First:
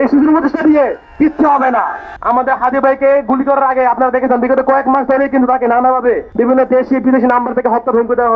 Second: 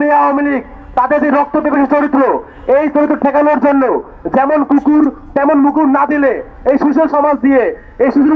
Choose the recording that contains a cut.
first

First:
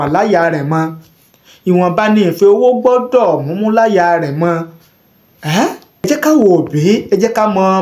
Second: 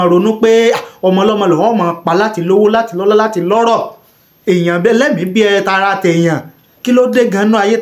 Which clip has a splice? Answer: first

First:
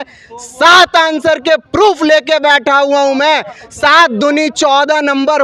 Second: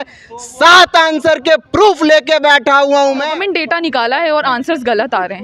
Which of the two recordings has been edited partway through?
second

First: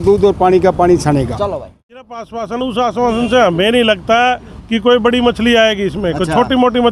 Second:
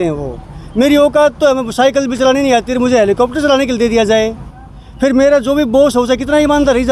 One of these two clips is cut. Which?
first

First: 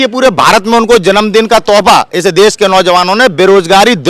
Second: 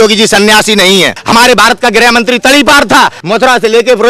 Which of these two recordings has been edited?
second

